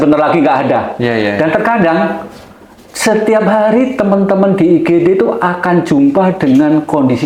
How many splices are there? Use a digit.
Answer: 0